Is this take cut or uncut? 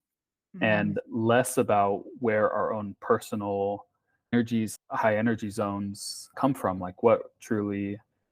cut